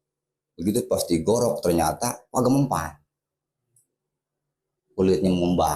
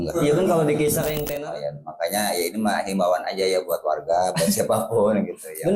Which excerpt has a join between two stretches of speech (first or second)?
second